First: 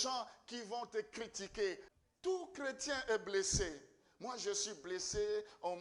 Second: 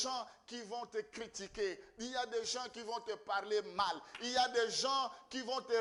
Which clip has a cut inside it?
first; 1 cut; at 1.9 s

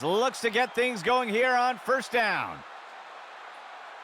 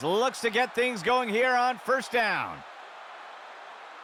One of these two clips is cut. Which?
first; 1 cut; at 2.6 s

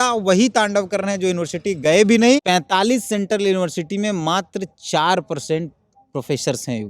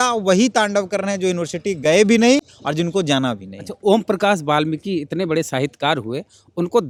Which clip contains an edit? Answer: first; 1 cut; at 2.4 s

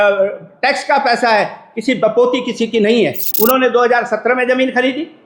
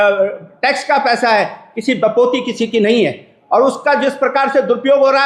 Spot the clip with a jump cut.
first; 1 cut; at 3.2 s

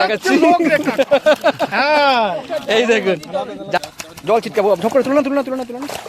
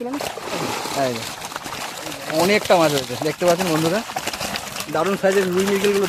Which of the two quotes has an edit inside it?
first; 1 cut; at 3.8 s

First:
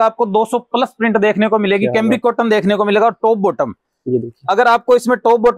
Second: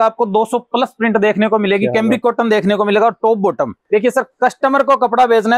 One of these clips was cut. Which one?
second; 1 cut; at 3.8 s

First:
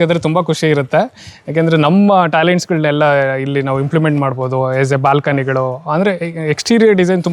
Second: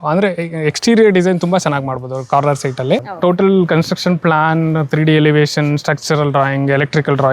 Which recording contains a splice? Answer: second; 1 cut; at 3.1 s

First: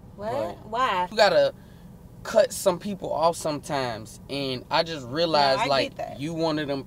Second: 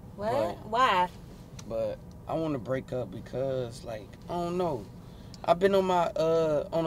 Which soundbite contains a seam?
first; 1 cut; at 1.1 s

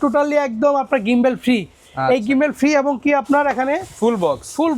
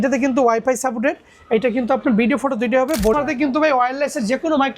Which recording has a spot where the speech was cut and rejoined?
second; 1 cut; at 3.1 s

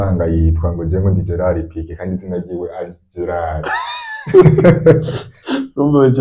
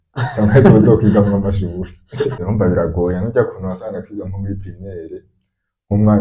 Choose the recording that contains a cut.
second; 1 cut; at 2.4 s

